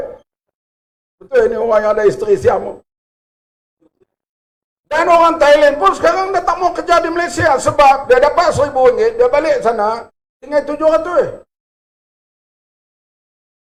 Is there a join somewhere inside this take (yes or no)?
no